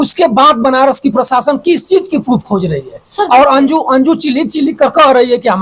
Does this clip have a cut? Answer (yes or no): no